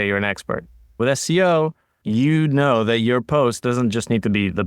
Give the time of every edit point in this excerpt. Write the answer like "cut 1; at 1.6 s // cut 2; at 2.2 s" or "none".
cut 1; at 0.9 s // cut 2; at 1.9 s